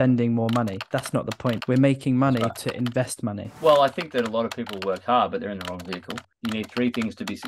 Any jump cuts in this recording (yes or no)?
yes